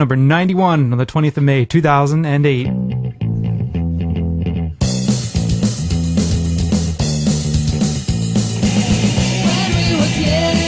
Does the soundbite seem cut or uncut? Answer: uncut